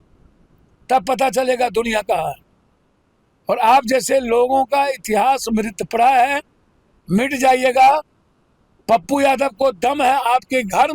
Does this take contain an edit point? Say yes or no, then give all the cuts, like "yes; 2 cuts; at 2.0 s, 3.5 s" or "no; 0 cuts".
no; 0 cuts